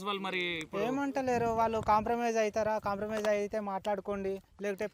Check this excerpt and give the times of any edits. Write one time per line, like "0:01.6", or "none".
none

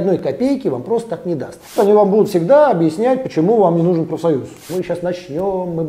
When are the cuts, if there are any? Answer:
0:01.7
0:04.6

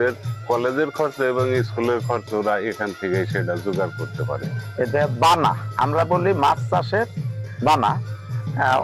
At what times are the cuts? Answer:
0:04.6

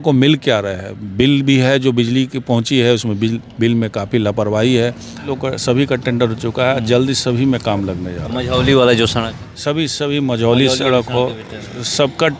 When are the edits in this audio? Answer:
0:05.3

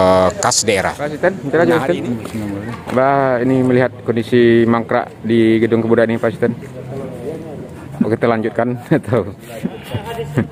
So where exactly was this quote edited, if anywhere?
0:01.1

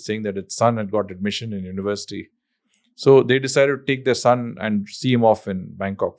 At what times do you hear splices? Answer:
none

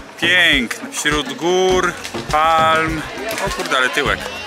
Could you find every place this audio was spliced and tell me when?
0:03.4

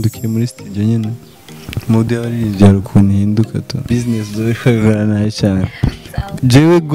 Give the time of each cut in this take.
0:03.8

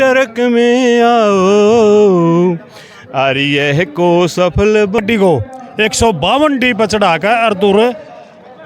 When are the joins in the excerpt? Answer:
0:05.0

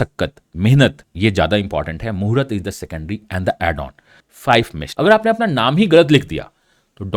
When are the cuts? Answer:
0:01.1
0:04.5

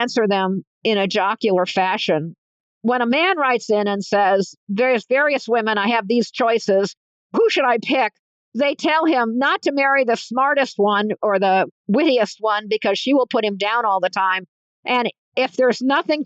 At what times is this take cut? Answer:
0:02.5

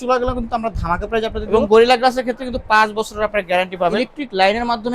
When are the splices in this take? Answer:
0:01.4
0:03.9

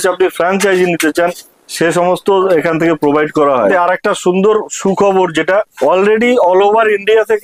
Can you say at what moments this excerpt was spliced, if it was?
0:03.7
0:05.7

